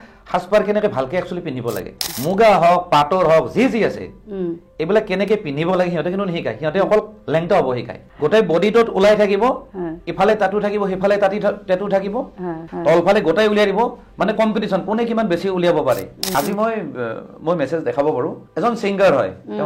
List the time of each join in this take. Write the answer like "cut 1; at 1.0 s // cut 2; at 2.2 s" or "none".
cut 1; at 2.1 s // cut 2; at 8.0 s // cut 3; at 12.6 s // cut 4; at 16.3 s // cut 5; at 18.4 s